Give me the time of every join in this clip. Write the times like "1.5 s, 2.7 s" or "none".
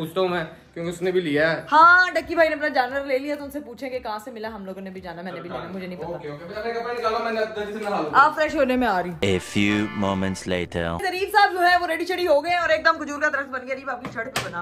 none